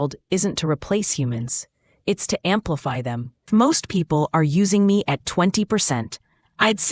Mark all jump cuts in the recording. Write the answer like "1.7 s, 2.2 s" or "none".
3.5 s